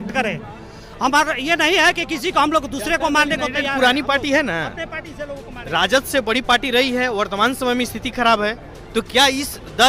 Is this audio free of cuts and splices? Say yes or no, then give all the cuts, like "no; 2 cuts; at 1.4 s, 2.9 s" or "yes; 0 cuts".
yes; 0 cuts